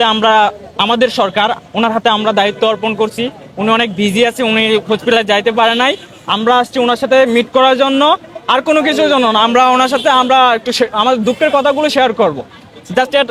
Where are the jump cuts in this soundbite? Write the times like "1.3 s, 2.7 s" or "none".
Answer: none